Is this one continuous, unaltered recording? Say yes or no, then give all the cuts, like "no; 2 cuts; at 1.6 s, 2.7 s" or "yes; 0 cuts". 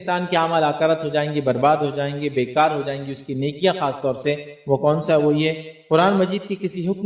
yes; 0 cuts